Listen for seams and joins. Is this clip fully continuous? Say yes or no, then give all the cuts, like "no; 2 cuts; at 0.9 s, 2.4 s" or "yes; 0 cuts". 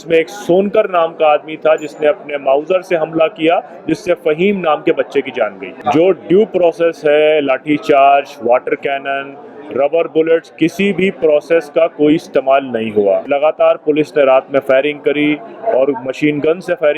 no; 2 cuts; at 5.7 s, 13.3 s